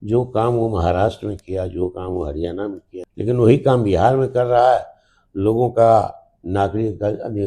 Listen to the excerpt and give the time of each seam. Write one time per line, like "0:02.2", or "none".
0:02.9